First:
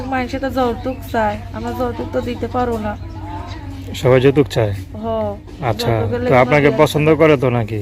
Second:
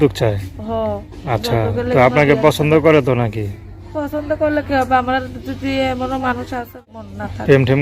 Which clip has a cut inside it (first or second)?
second